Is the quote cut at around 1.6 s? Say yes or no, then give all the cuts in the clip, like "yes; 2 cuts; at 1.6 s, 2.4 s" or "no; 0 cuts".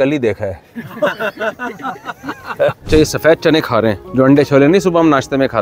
no; 2 cuts; at 2.8 s, 4.0 s